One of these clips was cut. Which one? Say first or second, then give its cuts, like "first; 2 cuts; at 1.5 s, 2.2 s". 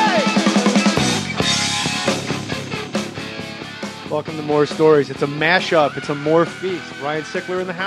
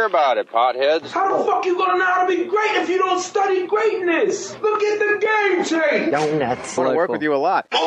second; 1 cut; at 1.1 s